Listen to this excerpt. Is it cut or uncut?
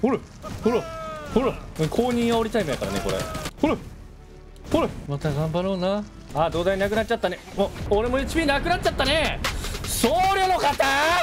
cut